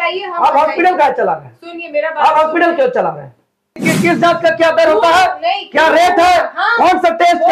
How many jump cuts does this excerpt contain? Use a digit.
1